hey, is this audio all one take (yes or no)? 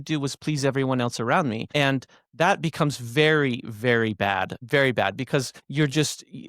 no